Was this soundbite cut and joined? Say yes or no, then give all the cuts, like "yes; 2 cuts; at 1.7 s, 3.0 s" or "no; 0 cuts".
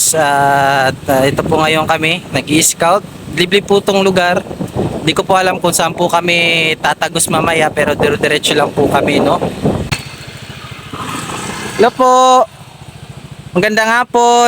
yes; 1 cut; at 9.9 s